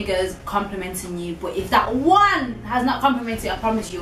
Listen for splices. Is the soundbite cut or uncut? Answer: uncut